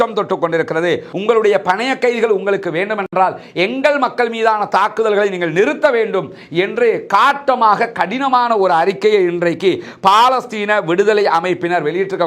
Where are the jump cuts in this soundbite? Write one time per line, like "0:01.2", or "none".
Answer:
0:01.1